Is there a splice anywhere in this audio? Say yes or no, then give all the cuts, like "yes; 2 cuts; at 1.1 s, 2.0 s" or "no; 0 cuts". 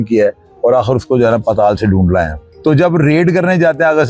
yes; 1 cut; at 2.5 s